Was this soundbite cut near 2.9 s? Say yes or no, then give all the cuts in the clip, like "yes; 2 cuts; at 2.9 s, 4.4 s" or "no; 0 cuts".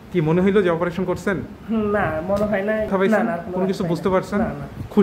yes; 1 cut; at 2.9 s